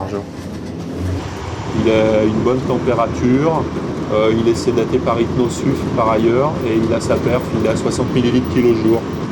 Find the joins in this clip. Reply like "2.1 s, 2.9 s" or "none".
1.2 s